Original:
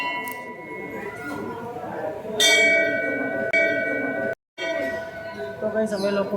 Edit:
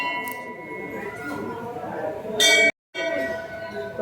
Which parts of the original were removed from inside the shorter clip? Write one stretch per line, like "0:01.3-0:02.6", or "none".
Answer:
0:02.7-0:04.3